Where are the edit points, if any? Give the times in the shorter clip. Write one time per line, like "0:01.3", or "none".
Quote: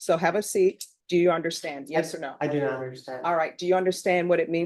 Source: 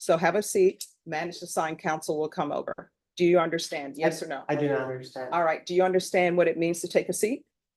0:00.9